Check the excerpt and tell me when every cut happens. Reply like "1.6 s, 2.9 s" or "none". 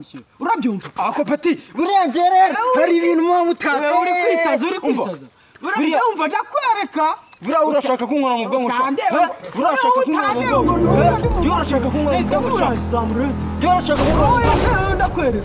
none